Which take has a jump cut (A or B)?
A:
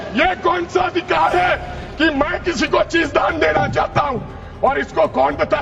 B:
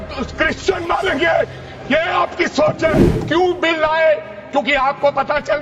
B